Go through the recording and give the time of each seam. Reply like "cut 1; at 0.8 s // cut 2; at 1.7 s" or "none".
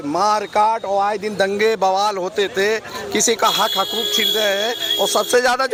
none